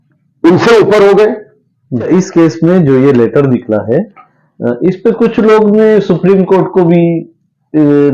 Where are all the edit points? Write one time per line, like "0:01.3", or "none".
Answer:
0:02.1